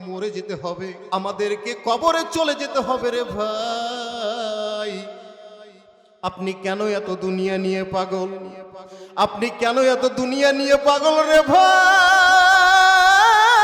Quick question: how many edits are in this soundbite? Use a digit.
1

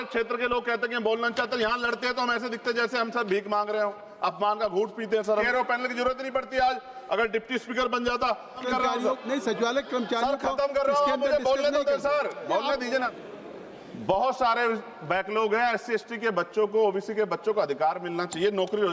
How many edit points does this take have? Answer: 3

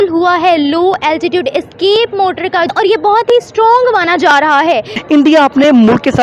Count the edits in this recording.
1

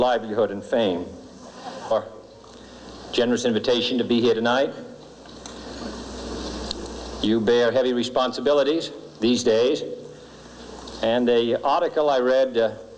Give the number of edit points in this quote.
0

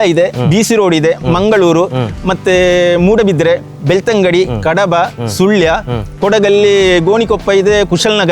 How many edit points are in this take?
1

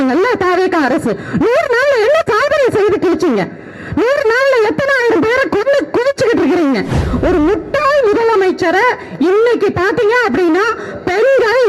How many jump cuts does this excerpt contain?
1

